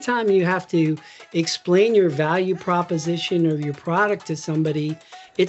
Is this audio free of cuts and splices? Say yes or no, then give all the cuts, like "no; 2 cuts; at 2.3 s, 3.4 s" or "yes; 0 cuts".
yes; 0 cuts